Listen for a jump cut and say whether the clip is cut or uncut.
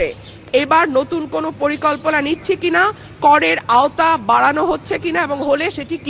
uncut